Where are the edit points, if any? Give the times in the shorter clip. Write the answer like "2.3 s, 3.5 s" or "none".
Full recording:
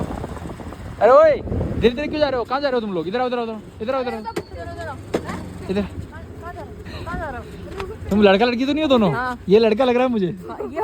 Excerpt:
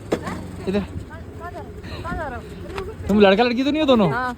none